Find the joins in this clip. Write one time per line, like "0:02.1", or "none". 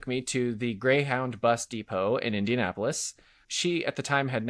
0:03.5